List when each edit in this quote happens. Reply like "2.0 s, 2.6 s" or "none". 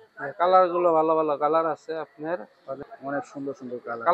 2.8 s